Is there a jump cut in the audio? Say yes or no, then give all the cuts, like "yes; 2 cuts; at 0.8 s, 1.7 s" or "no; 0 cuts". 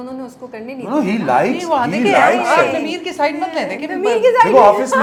no; 0 cuts